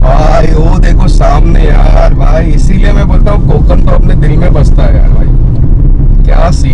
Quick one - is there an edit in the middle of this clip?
no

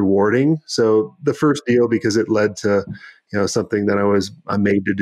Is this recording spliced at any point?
no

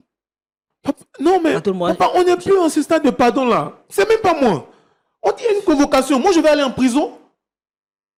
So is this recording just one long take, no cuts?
yes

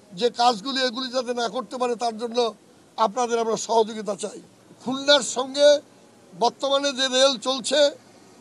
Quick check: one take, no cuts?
yes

